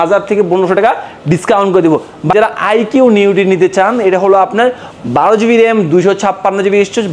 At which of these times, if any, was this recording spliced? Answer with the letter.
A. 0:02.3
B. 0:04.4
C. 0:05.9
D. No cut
A